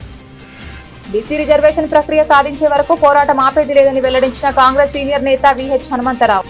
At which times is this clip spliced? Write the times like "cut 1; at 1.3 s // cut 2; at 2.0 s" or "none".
none